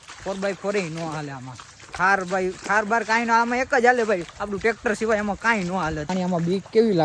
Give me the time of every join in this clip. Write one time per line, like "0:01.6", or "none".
0:06.1